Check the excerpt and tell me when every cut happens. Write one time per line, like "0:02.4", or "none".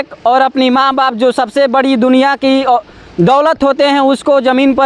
none